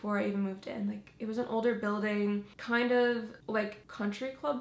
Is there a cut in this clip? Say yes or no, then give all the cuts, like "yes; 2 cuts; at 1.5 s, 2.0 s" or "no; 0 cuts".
no; 0 cuts